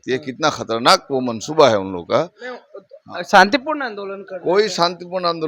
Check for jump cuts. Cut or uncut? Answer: uncut